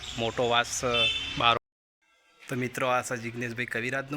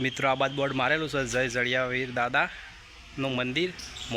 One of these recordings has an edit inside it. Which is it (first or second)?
first